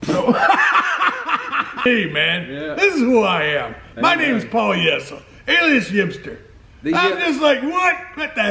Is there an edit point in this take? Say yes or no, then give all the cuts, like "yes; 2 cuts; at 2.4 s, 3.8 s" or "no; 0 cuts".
yes; 1 cut; at 1.9 s